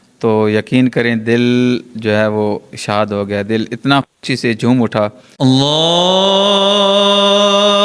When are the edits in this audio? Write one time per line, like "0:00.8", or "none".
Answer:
0:05.2